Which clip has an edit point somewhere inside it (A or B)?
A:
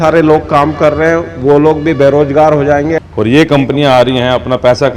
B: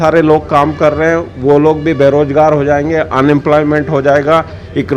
A